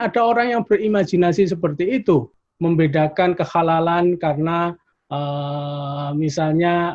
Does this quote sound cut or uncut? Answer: cut